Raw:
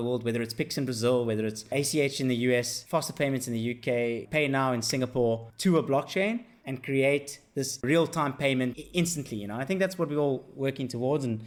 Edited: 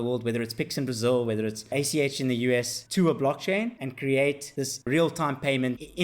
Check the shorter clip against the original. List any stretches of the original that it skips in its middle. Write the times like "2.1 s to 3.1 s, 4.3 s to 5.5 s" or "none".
2.8 s to 5.5 s, 6.5 s to 6.7 s, 7.4 s to 7.5 s